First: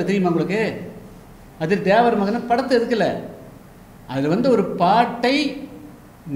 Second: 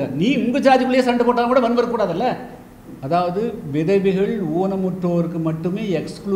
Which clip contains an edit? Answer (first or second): second